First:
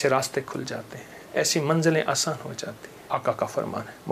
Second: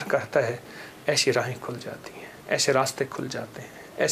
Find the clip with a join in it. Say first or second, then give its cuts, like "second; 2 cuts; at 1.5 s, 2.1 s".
first; 1 cut; at 2.9 s